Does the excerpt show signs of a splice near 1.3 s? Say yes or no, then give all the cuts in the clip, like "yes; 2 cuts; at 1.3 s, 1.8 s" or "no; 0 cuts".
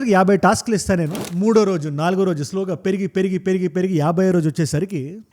yes; 1 cut; at 1.3 s